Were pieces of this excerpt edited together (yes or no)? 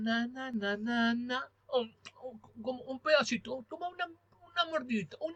no